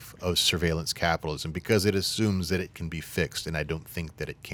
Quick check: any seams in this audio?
no; 0 cuts

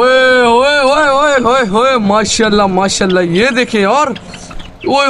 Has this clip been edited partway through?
no; 0 cuts

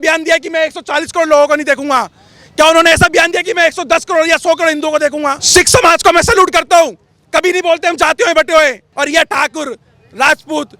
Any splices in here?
yes; 2 cuts; at 5.4 s, 8.8 s

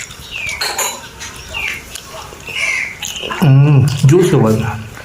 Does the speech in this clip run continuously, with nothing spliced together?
yes; 0 cuts

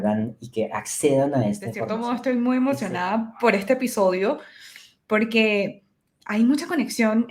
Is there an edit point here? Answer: yes; 1 cut; at 1.9 s

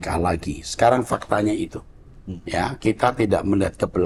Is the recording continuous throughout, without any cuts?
yes; 0 cuts

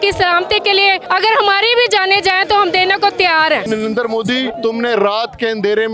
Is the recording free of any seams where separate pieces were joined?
no; 3 cuts; at 1.0 s, 3.6 s, 4.6 s

